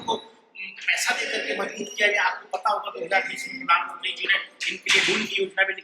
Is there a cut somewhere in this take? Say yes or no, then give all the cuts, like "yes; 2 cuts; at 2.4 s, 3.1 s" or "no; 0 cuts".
no; 0 cuts